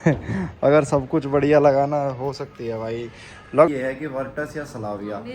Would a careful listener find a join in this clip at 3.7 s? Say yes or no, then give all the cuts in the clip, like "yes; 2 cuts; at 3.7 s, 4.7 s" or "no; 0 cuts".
yes; 1 cut; at 3.7 s